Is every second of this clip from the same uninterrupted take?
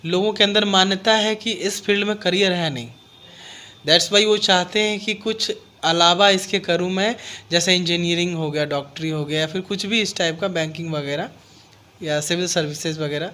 yes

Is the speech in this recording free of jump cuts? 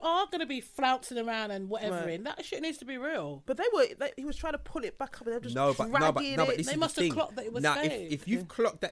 yes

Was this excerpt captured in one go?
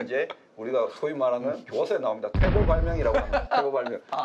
yes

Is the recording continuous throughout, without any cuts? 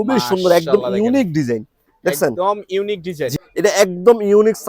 no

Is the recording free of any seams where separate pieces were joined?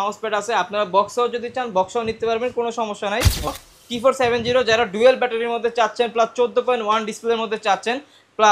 no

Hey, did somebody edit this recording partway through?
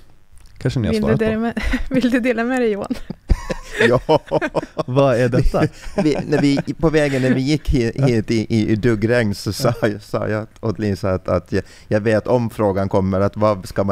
no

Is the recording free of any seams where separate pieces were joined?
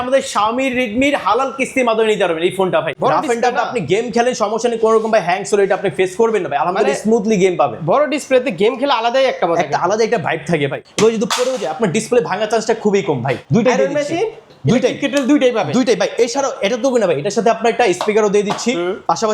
no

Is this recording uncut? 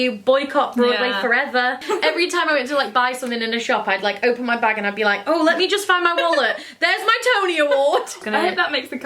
no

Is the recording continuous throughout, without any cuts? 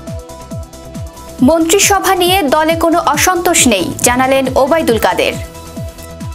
no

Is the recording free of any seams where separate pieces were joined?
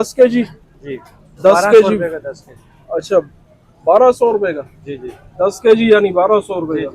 yes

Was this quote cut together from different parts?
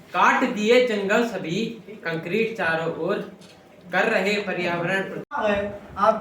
yes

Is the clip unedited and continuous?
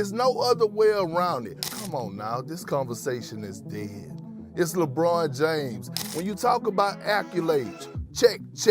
no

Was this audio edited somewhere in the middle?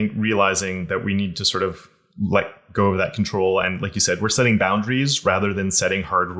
no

